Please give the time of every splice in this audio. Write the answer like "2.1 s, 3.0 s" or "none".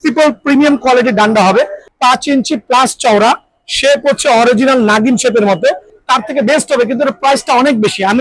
1.8 s, 5.9 s